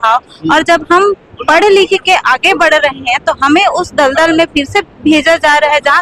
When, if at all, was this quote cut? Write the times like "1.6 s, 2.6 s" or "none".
none